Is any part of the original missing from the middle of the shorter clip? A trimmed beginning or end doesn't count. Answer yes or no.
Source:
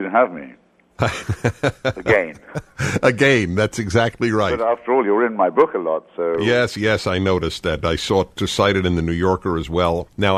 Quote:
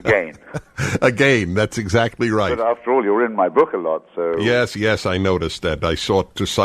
no